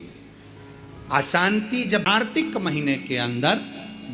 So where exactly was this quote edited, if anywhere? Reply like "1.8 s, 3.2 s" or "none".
2.2 s